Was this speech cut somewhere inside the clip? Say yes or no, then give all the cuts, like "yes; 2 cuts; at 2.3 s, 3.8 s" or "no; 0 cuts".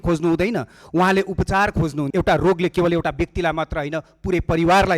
yes; 1 cut; at 2.0 s